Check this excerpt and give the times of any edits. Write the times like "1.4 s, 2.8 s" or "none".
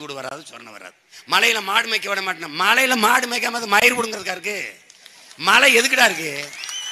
1.1 s